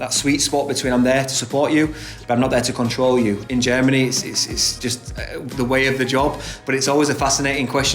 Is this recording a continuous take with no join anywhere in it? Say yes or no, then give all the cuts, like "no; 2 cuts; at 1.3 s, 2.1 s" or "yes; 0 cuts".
no; 2 cuts; at 3.4 s, 4.8 s